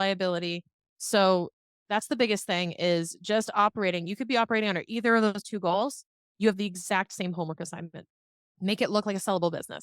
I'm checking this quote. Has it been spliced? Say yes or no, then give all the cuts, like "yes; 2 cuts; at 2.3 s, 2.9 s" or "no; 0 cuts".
yes; 1 cut; at 8.6 s